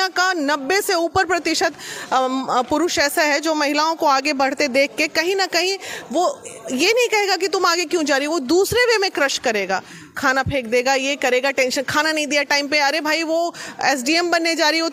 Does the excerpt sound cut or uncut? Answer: uncut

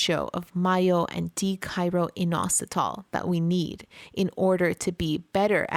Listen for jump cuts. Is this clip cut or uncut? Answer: uncut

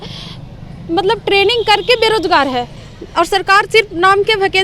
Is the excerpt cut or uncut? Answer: uncut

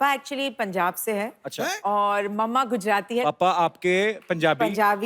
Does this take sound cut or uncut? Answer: cut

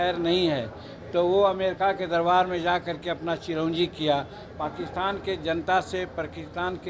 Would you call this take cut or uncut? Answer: cut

